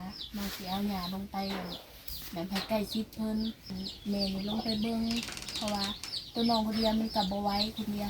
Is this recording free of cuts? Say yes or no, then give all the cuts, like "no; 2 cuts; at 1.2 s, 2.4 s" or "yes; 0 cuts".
no; 1 cut; at 3.7 s